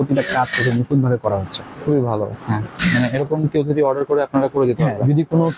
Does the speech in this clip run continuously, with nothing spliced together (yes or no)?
no